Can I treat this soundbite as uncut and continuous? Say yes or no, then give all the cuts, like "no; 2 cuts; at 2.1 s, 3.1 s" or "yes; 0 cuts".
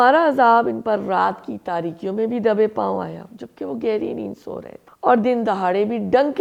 yes; 0 cuts